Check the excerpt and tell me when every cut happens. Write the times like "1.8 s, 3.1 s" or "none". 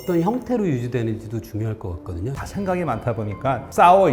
2.3 s

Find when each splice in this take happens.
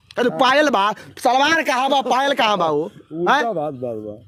none

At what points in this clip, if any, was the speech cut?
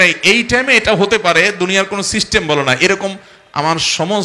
none

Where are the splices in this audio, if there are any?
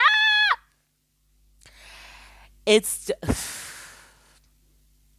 none

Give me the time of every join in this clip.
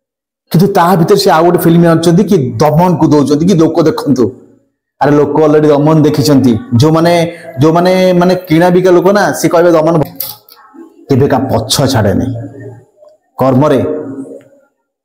10.0 s

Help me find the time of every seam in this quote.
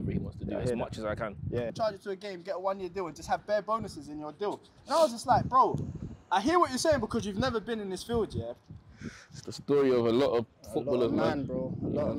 1.7 s, 8.4 s

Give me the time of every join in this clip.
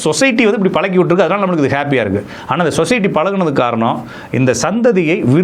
none

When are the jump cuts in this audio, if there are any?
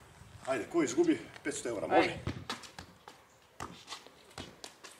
2.3 s

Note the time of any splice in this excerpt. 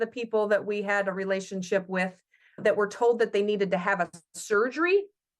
2.6 s

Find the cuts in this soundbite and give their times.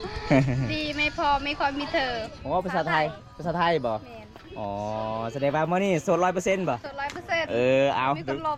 none

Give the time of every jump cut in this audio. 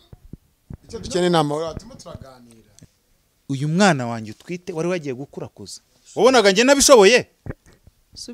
2.6 s

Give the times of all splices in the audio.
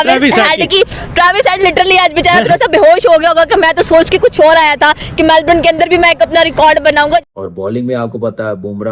7.3 s

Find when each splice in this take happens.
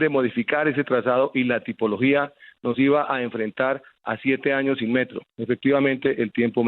none

